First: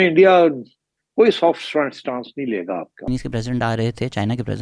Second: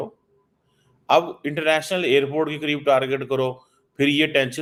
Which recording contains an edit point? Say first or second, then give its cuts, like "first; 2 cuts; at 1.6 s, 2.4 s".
first; 1 cut; at 3.1 s